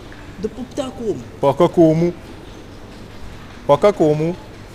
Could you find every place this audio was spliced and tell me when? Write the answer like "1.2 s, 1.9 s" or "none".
none